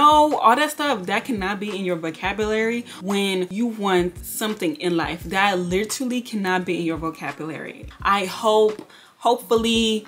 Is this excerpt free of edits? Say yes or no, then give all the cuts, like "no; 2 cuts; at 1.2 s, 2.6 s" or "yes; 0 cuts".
yes; 0 cuts